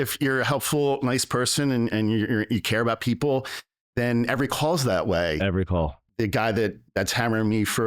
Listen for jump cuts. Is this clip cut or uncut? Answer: cut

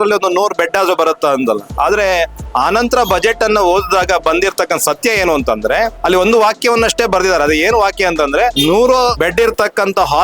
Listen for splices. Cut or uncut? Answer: cut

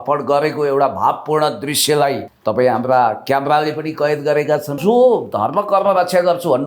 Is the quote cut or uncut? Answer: cut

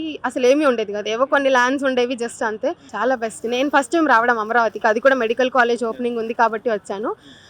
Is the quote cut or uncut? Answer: cut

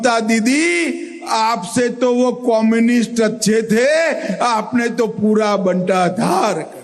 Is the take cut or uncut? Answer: uncut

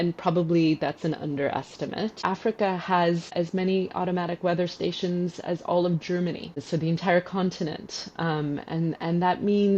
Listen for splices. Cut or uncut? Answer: cut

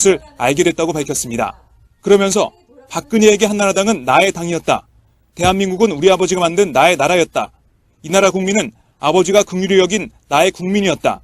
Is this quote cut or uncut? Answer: cut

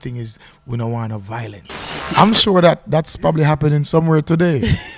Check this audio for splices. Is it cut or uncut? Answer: cut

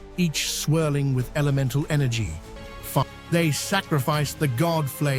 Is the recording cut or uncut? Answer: cut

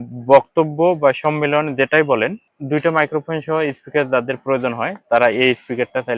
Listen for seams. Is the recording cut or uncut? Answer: cut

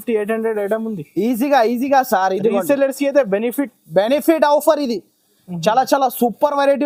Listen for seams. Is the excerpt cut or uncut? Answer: uncut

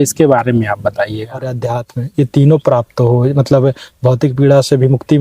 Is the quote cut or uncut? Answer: cut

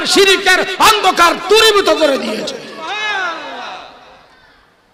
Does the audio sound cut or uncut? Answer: uncut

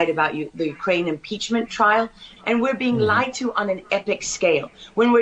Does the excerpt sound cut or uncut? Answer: cut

